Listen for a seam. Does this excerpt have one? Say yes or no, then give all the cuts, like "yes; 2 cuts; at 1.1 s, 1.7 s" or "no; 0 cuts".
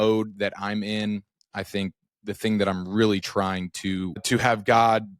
yes; 1 cut; at 4.2 s